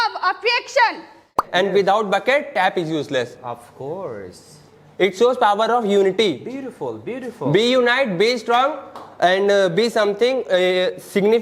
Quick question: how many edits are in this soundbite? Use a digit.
1